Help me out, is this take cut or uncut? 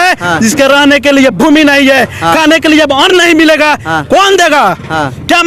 uncut